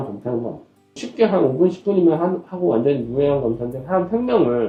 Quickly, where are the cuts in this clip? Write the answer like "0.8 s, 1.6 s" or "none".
none